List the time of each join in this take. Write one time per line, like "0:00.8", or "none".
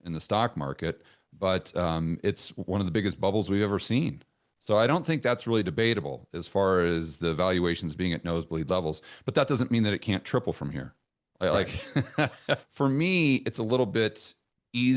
0:12.7